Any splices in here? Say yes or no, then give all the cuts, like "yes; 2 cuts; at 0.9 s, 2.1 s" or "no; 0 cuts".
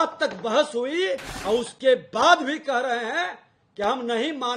yes; 1 cut; at 1.3 s